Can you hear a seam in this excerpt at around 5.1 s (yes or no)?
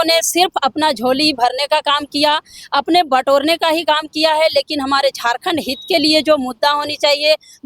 no